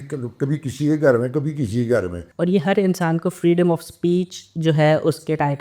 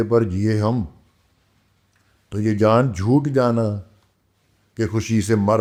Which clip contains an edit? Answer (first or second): first